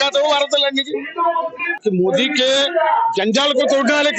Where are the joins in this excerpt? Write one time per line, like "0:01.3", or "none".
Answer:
0:01.8